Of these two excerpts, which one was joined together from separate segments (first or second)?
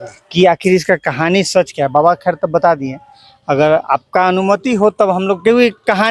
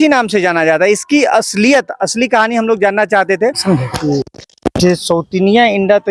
second